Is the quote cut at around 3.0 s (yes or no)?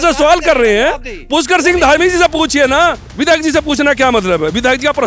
yes